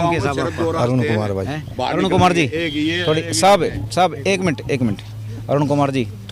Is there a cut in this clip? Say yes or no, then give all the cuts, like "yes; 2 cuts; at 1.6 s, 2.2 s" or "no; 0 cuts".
no; 0 cuts